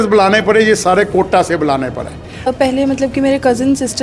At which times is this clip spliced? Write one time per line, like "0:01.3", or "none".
0:02.5